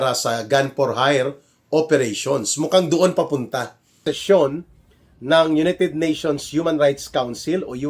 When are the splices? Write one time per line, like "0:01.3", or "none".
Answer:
0:04.0